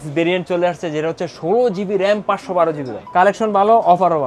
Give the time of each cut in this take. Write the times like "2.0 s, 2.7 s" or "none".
2.9 s

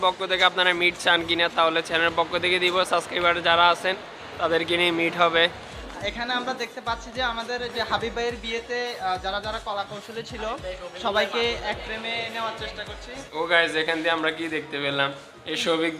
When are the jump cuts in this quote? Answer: 5.6 s, 13.3 s

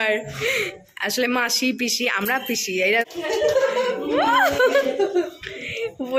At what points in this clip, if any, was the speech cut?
3.0 s

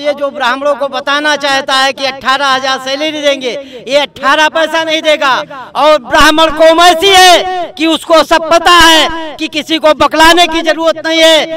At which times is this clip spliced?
none

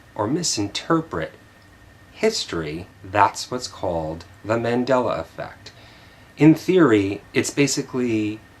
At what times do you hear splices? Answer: 4.3 s

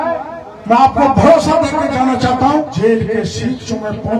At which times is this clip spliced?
2.7 s

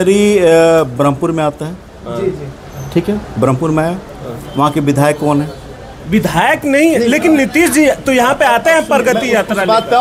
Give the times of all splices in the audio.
none

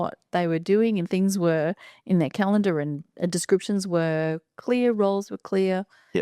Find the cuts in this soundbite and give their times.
none

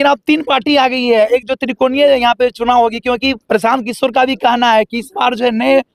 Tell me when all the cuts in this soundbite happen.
none

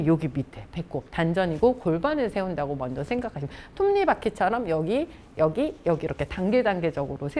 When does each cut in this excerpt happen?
none

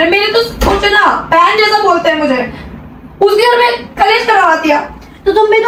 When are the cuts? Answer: none

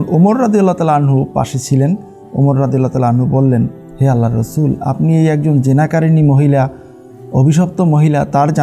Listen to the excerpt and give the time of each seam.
3.8 s

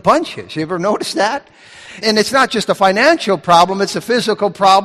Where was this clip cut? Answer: 2.0 s

